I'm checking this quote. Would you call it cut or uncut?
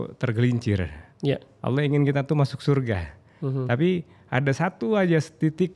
uncut